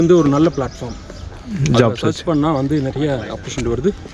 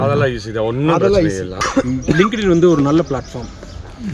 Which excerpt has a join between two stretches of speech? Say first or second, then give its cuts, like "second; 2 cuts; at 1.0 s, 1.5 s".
second; 1 cut; at 1.6 s